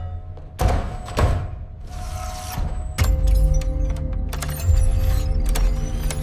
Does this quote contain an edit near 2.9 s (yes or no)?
no